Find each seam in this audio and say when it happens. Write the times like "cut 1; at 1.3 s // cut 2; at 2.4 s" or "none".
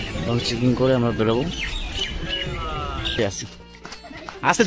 cut 1; at 3.2 s